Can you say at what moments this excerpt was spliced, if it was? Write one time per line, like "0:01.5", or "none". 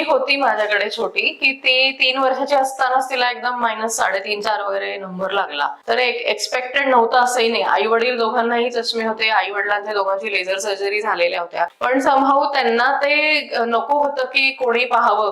0:05.8
0:11.7